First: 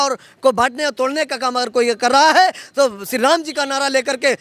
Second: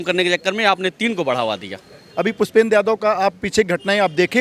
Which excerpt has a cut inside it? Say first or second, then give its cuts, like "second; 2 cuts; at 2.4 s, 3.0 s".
second; 1 cut; at 2.0 s